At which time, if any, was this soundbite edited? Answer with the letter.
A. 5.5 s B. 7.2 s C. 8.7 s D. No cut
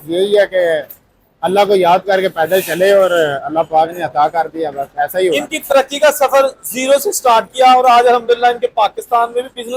A